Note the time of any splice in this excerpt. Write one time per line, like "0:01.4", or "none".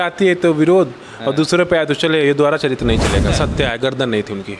0:03.3